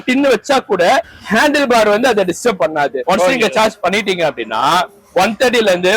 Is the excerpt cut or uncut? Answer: cut